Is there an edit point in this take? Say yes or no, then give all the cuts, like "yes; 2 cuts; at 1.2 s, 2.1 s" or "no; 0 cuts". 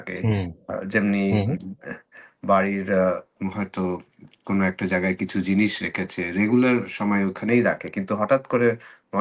no; 0 cuts